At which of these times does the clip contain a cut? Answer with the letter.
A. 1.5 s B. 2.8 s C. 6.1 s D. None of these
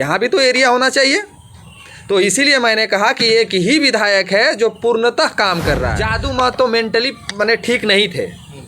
C